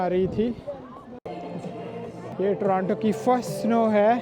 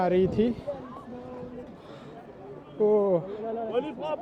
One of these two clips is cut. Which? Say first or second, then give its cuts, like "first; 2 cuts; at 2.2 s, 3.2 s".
first; 2 cuts; at 1.2 s, 2.3 s